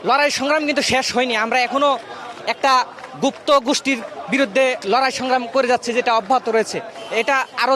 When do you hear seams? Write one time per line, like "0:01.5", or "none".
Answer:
0:04.8